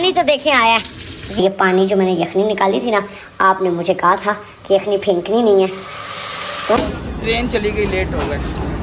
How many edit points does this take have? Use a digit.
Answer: 2